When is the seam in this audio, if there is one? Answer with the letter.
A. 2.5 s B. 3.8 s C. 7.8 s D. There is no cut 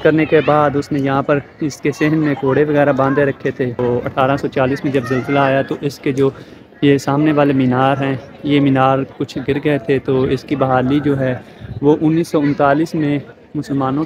B